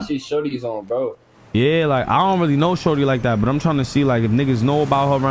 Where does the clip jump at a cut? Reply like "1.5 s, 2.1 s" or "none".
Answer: none